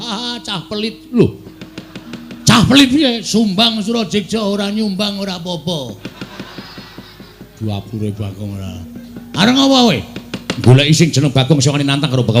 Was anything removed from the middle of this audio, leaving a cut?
no; 0 cuts

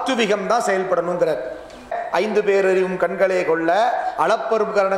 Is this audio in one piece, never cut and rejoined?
no; 1 cut; at 2.0 s

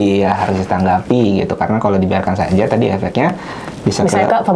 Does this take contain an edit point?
no; 0 cuts

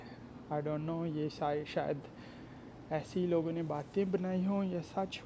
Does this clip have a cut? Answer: no; 0 cuts

